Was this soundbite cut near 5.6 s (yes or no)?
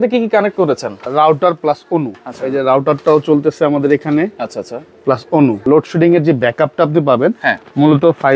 yes